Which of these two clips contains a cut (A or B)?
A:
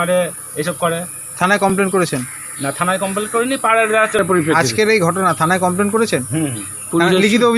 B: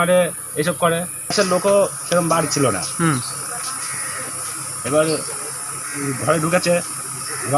B